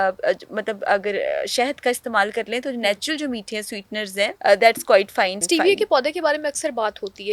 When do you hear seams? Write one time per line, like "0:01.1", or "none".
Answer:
0:04.4
0:05.4